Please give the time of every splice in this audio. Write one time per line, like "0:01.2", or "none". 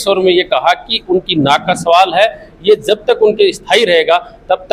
none